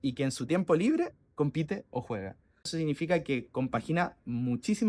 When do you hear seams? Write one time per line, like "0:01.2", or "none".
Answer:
0:02.7